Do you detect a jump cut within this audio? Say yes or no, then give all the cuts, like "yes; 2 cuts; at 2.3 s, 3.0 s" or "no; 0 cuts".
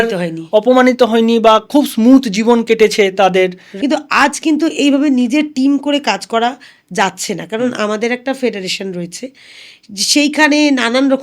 yes; 1 cut; at 3.7 s